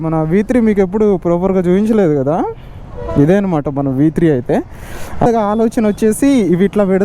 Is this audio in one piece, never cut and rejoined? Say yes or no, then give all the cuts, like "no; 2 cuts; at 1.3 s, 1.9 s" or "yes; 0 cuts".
no; 1 cut; at 5.2 s